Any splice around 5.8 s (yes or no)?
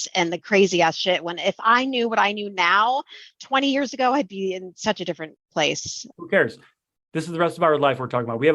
yes